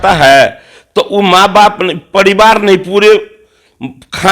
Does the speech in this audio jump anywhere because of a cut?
no; 0 cuts

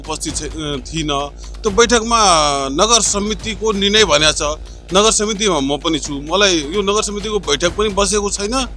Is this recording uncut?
yes; 0 cuts

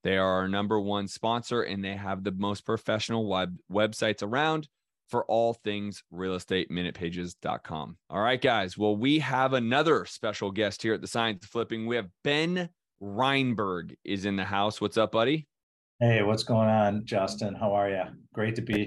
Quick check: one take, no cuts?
no; 1 cut; at 8.0 s

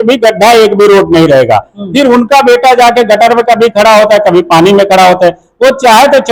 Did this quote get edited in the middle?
no; 0 cuts

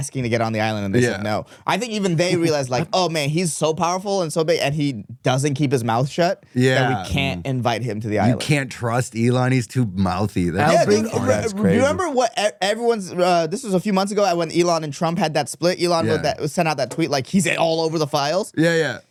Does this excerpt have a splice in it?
no; 0 cuts

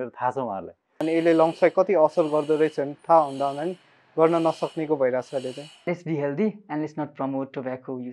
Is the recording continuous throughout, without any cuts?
no; 2 cuts; at 1.0 s, 5.8 s

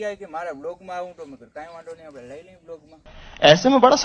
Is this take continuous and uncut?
yes; 0 cuts

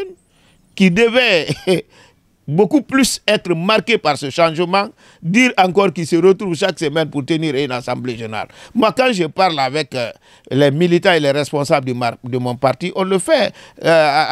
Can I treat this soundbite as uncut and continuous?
yes; 0 cuts

